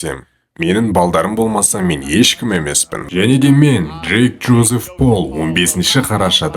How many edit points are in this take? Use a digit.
1